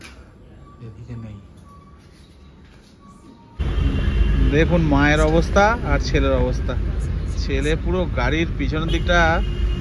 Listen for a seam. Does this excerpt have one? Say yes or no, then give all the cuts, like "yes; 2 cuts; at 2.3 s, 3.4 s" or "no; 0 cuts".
yes; 1 cut; at 3.6 s